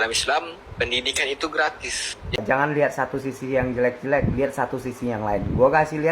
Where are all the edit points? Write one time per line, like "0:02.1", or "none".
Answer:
0:02.4